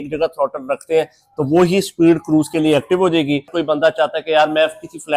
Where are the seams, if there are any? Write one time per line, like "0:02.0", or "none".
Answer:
0:03.6